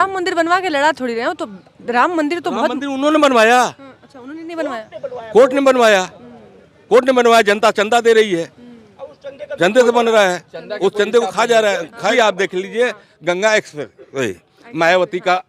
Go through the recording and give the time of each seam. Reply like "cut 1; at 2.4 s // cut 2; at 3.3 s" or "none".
cut 1; at 12.1 s